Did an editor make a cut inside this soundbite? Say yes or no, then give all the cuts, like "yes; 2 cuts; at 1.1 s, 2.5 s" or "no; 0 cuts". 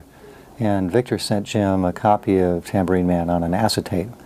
yes; 1 cut; at 3.1 s